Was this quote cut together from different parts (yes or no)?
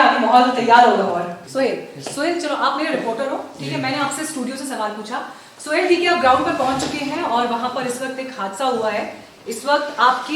yes